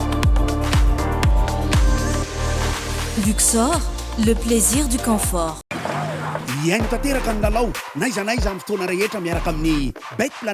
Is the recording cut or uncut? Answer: cut